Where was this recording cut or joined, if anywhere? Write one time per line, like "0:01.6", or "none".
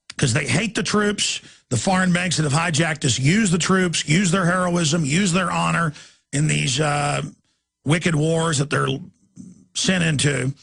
0:03.1